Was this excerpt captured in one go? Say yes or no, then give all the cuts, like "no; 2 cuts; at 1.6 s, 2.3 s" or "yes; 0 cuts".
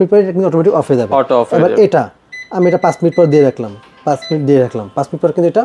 yes; 0 cuts